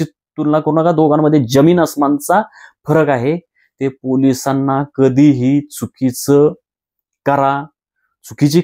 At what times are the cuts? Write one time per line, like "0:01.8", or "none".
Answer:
none

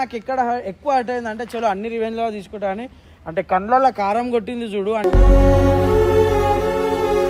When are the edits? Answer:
none

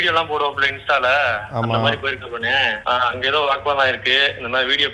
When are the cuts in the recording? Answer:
0:02.8

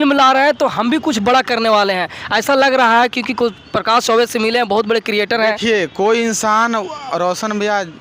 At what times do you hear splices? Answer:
none

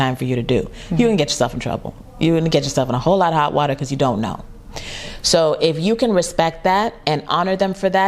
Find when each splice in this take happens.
0:07.0

